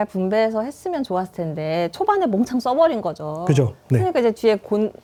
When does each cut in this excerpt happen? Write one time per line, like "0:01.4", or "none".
none